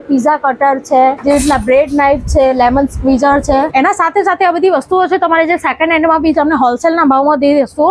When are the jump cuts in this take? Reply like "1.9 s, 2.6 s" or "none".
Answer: 1.2 s, 3.7 s